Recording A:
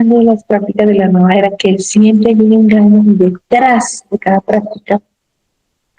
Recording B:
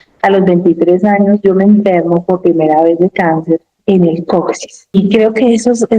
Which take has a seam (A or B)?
B